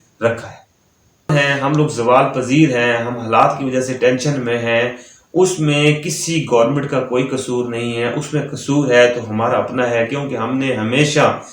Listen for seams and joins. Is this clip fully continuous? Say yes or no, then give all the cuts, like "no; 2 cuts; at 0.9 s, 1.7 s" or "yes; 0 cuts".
no; 1 cut; at 1.3 s